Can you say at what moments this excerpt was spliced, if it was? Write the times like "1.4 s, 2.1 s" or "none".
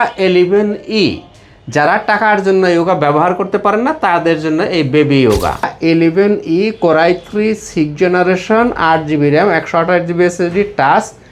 5.7 s